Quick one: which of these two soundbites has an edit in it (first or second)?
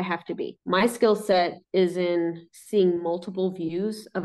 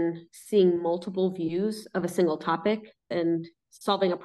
second